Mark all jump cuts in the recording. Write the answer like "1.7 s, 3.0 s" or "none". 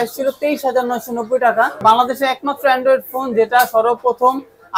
1.8 s